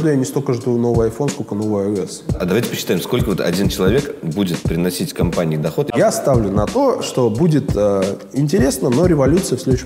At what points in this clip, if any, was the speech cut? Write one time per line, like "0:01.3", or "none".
0:02.3
0:05.9

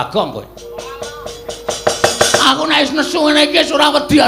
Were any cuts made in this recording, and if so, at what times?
none

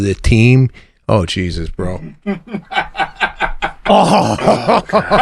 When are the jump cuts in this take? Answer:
0:02.7

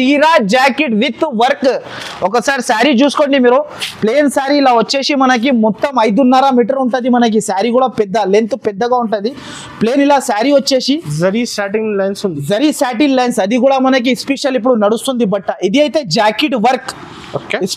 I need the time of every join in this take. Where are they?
none

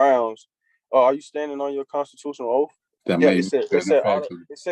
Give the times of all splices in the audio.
0:02.9

